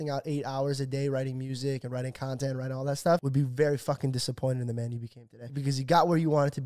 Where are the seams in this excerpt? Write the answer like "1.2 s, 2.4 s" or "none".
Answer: 3.3 s, 5.6 s